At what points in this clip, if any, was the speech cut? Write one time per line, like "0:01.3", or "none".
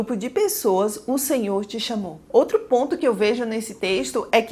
none

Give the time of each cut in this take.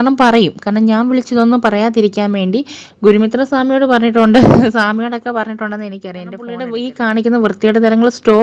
0:06.6

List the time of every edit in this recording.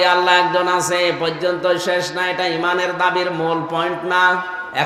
none

